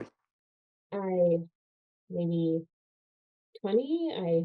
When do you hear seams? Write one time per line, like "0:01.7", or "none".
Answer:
none